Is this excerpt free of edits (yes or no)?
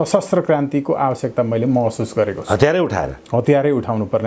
yes